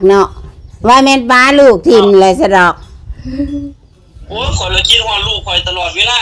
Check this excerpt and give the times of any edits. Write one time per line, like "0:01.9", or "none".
none